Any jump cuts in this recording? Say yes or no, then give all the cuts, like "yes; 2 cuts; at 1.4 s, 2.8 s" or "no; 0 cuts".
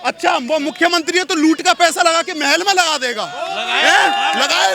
no; 0 cuts